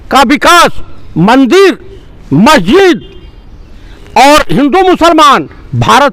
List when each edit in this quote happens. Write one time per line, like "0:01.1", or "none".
none